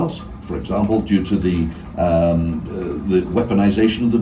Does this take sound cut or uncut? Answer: uncut